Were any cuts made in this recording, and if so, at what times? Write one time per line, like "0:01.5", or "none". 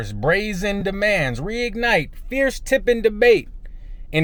none